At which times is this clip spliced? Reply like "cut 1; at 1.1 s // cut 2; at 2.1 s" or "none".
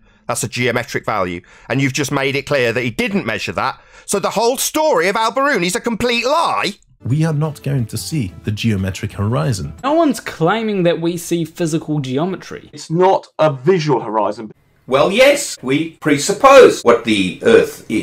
cut 1; at 7.1 s // cut 2; at 9.9 s // cut 3; at 12.8 s // cut 4; at 14.5 s // cut 5; at 15.7 s // cut 6; at 16.8 s